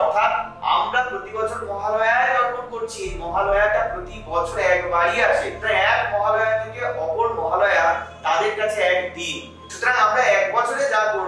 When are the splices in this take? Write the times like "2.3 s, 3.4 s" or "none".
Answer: none